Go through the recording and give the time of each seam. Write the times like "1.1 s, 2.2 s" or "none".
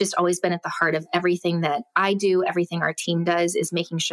none